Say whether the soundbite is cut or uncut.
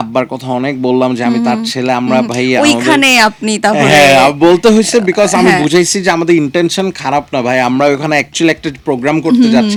uncut